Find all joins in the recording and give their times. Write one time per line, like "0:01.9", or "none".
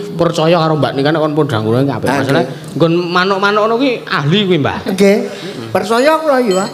none